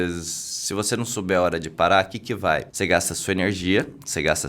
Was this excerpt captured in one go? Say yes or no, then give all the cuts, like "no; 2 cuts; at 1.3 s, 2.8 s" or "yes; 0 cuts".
no; 1 cut; at 2.7 s